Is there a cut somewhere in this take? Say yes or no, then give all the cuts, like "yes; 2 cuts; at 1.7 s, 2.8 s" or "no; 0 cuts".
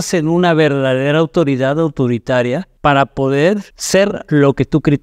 yes; 2 cuts; at 2.7 s, 3.7 s